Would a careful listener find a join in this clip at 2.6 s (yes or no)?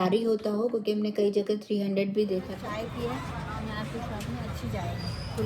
yes